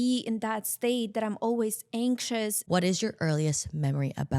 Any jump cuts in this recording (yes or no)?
yes